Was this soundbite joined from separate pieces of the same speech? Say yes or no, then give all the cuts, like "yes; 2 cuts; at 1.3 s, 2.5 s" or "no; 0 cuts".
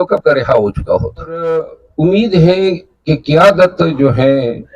yes; 1 cut; at 1.2 s